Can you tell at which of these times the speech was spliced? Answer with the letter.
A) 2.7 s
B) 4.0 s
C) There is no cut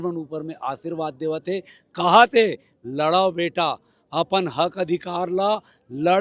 C